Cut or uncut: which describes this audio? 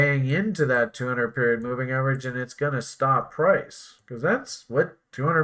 uncut